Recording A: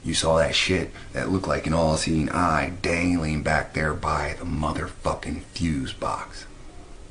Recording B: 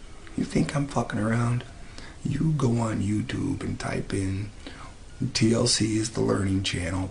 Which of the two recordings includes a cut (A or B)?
A